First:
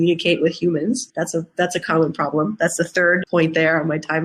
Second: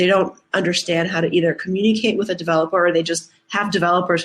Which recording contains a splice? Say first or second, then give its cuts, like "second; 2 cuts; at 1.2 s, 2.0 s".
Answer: first; 2 cuts; at 1.1 s, 3.2 s